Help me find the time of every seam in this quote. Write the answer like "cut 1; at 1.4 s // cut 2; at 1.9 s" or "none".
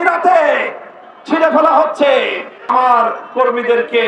cut 1; at 2.7 s